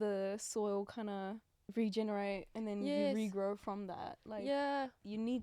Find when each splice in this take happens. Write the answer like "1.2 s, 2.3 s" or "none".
1.5 s

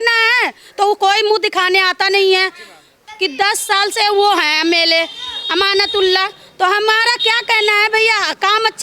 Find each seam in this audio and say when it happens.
3.0 s

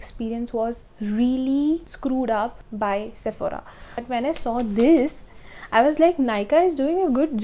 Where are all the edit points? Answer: 0.9 s, 1.9 s, 2.6 s, 4.0 s

